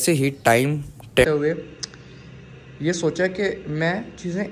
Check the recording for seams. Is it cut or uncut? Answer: cut